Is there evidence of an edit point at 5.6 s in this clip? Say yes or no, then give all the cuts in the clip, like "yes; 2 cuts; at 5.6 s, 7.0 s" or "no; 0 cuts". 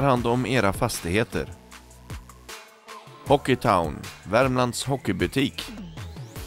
yes; 1 cut; at 5.6 s